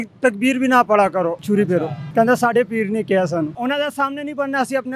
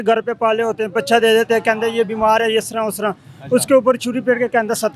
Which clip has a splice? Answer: first; 2 cuts; at 1.5 s, 3.5 s

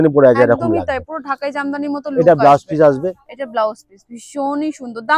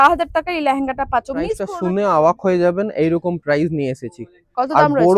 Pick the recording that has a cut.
second; 1 cut; at 1.7 s

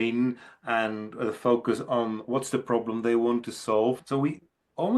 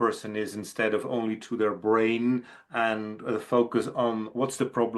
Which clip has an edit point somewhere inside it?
first; 1 cut; at 4.0 s

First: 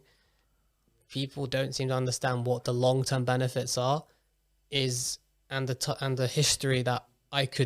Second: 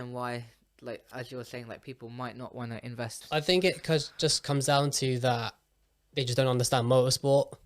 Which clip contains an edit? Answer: second; 1 cut; at 3.2 s

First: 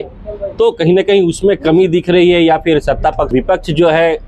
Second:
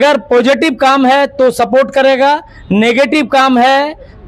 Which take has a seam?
first; 1 cut; at 3.3 s

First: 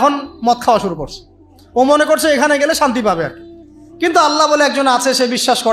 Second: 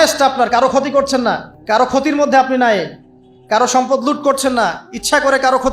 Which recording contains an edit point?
second; 1 cut; at 1.5 s

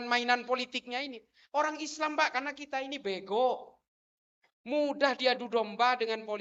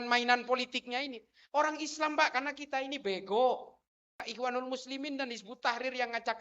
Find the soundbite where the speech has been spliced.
second; 1 cut; at 4.3 s

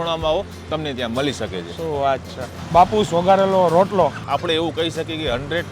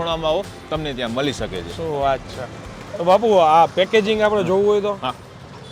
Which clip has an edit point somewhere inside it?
first; 2 cuts; at 2.6 s, 4.3 s

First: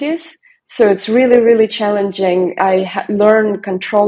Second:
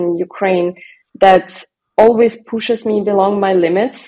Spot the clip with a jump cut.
first; 1 cut; at 2.5 s

